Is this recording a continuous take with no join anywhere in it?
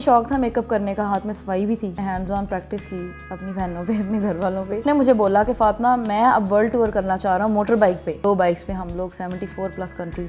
no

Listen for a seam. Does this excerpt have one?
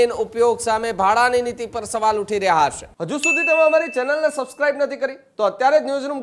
yes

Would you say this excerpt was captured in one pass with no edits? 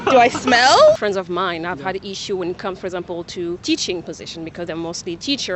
no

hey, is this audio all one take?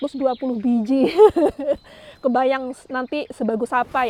yes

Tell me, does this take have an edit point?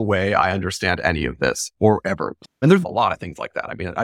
yes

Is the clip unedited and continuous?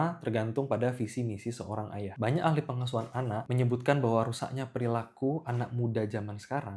no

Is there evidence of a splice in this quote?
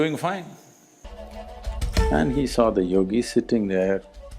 yes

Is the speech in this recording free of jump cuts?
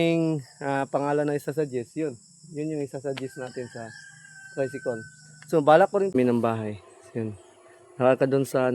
no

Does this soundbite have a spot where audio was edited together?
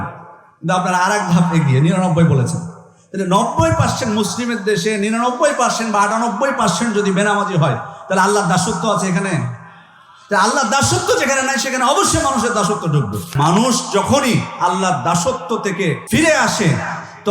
yes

